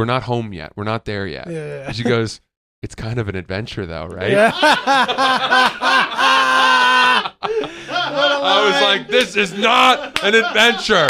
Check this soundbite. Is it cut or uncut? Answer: uncut